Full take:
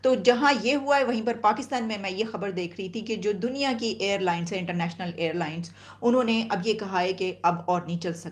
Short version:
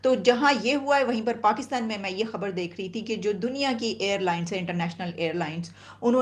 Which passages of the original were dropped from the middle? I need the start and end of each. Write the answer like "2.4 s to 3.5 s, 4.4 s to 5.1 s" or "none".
none